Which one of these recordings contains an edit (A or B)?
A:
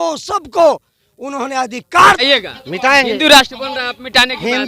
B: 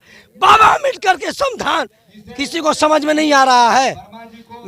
A